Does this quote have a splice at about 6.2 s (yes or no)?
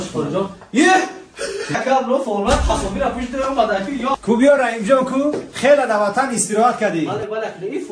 no